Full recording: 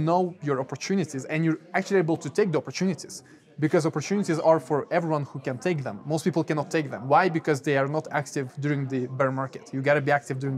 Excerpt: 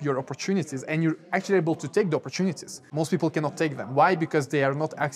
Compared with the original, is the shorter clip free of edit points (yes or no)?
no